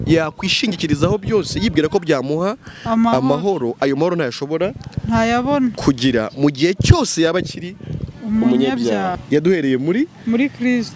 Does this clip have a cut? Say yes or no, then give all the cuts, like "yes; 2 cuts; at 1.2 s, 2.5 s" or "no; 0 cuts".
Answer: yes; 1 cut; at 9.2 s